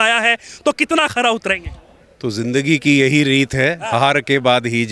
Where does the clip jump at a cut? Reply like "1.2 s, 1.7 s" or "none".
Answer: none